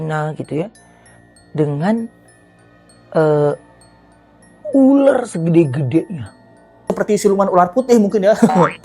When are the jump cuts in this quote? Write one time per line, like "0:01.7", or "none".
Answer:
0:06.9